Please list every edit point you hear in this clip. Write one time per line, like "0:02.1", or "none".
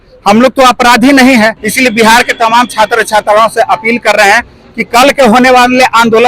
0:01.6